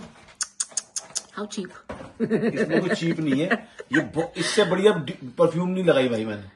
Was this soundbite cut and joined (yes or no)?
no